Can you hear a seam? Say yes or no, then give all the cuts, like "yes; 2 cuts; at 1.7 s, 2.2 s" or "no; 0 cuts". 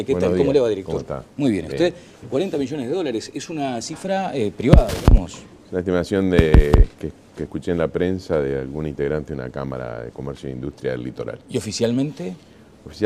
yes; 1 cut; at 9.0 s